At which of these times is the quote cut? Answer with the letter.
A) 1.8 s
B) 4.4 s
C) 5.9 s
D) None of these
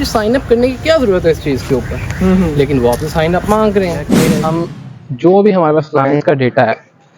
B